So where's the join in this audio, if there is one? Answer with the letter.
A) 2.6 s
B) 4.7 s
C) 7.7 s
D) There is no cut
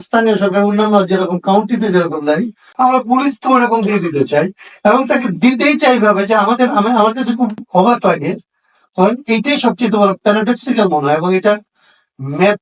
A